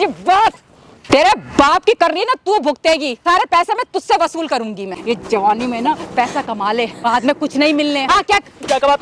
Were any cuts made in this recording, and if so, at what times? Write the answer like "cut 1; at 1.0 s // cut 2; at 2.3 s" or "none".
cut 1; at 1.1 s // cut 2; at 3.2 s // cut 3; at 5.0 s // cut 4; at 7.0 s // cut 5; at 8.1 s

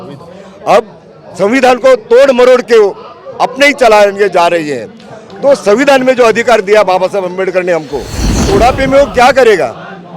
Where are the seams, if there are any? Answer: cut 1; at 8.5 s

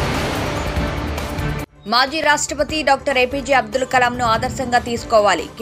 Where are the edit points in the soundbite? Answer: none

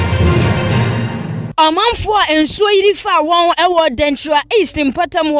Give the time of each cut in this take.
cut 1; at 1.2 s

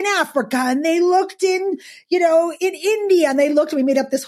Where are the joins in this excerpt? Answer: none

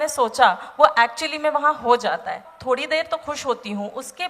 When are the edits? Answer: cut 1; at 2.5 s

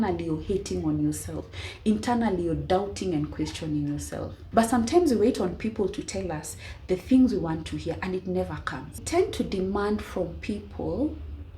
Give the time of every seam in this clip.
cut 1; at 4.4 s // cut 2; at 9.0 s

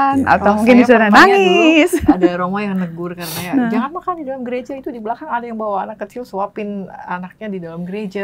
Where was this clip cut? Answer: none

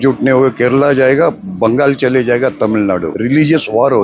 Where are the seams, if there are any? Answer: cut 1; at 3.1 s

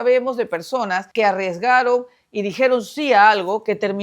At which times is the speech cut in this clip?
cut 1; at 1.0 s

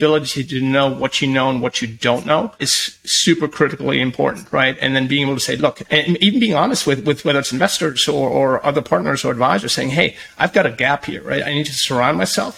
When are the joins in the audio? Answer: cut 1; at 2.8 s // cut 2; at 5.8 s

